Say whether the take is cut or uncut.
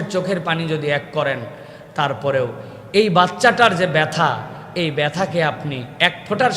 uncut